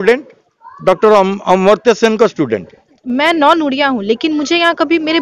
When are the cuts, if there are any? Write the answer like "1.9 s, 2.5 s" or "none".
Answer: 3.0 s